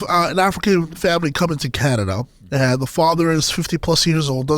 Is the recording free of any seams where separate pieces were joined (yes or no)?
no